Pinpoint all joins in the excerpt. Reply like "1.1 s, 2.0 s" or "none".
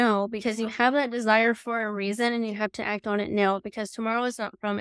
none